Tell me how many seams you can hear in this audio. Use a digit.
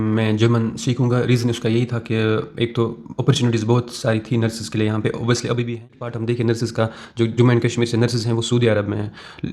1